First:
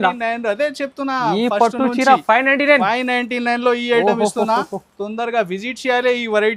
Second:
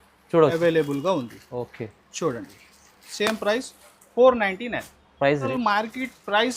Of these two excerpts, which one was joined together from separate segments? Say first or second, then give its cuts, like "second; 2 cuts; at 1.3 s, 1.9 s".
second; 1 cut; at 5.5 s